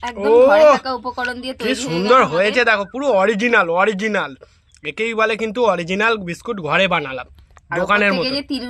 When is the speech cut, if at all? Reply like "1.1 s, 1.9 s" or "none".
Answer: none